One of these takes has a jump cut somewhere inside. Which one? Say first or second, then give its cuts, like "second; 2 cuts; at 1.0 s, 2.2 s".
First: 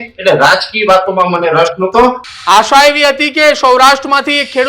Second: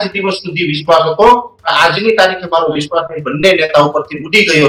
first; 1 cut; at 2.3 s